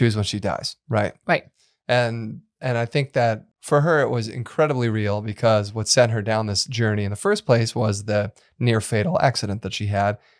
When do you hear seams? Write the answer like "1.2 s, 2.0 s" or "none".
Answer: 3.5 s